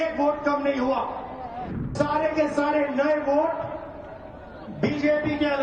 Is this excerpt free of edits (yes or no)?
no